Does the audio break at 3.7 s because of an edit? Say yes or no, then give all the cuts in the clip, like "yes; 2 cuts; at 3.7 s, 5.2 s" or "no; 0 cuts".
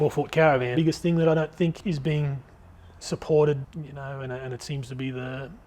yes; 3 cuts; at 0.7 s, 1.8 s, 3.7 s